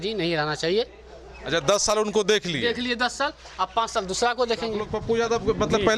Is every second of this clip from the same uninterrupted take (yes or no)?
no